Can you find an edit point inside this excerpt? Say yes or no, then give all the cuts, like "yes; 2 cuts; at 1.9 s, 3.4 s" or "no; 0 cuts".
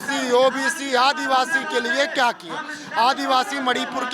no; 0 cuts